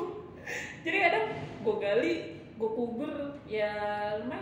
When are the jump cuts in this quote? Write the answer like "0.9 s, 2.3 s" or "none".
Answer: none